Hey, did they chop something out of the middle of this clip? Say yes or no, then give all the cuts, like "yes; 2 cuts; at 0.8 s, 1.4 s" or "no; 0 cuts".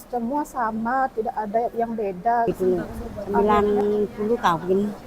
yes; 1 cut; at 2.5 s